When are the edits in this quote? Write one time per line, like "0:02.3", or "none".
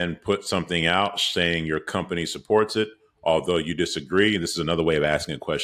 none